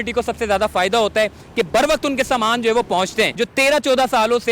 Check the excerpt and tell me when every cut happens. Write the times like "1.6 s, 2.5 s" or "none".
3.3 s